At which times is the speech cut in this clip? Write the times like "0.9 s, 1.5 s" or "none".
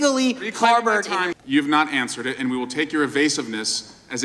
1.3 s